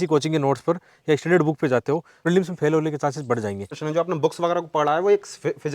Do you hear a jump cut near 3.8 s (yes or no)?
yes